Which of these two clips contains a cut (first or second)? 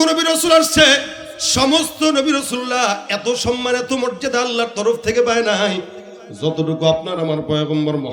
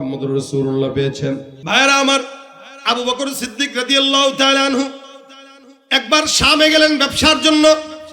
second